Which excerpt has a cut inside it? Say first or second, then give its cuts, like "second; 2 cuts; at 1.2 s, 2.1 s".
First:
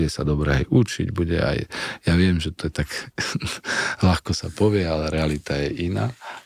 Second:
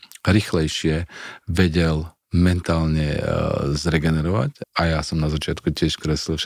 second; 1 cut; at 4.6 s